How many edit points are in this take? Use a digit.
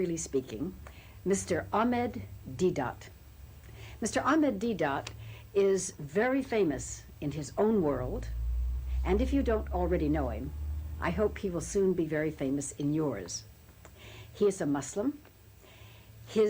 1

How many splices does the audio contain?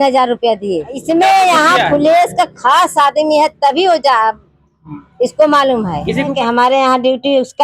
2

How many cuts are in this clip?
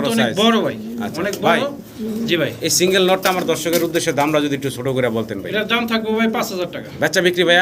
0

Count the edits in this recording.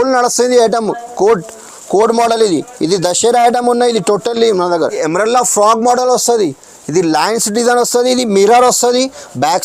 1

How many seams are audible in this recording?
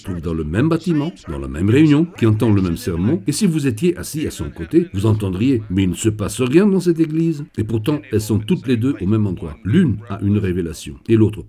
1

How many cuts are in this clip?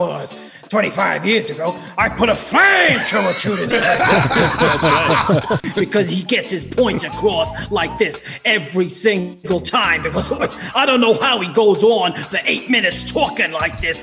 1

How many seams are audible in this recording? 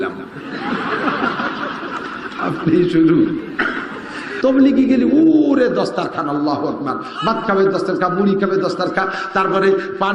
1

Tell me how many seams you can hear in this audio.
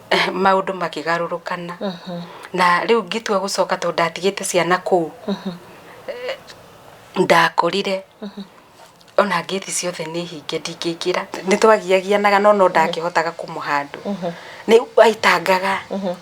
1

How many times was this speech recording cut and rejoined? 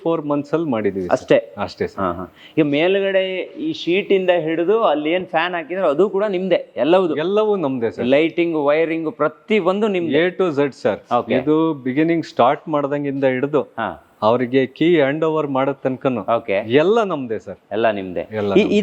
0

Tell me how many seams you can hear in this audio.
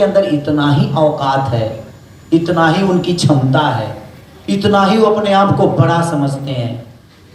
0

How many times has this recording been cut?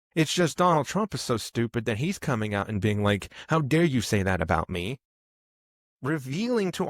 0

